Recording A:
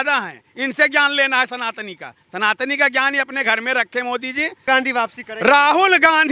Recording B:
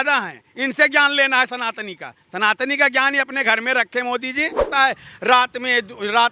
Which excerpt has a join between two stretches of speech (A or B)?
B